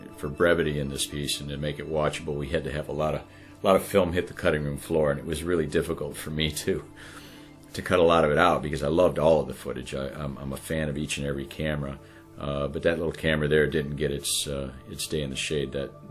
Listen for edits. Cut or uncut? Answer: cut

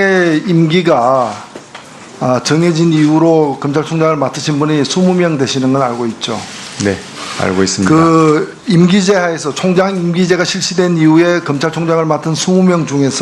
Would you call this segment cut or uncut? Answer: cut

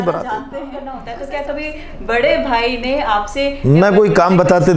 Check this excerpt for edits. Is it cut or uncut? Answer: cut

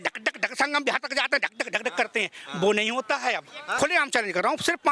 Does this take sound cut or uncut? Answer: cut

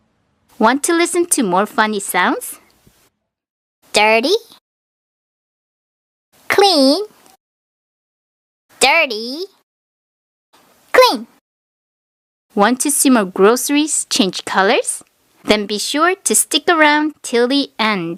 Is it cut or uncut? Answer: uncut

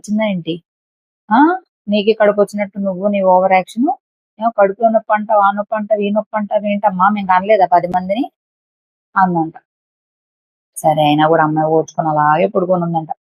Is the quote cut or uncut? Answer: uncut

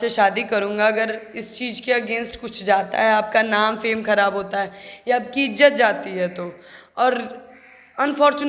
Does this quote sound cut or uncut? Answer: uncut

